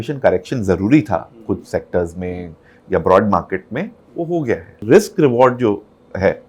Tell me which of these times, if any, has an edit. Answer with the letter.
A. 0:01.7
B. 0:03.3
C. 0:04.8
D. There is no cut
C